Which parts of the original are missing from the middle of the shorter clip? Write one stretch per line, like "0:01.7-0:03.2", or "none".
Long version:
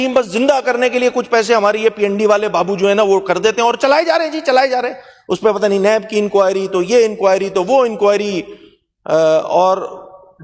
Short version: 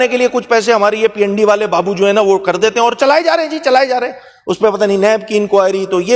none